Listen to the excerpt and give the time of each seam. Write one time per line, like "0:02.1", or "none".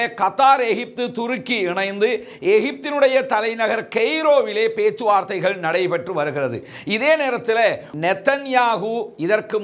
0:07.9